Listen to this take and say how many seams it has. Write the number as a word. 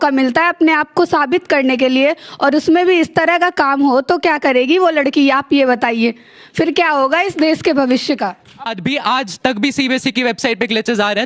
one